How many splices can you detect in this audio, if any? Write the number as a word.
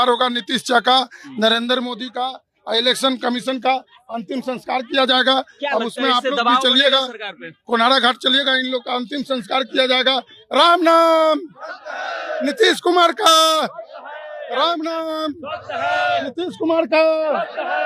zero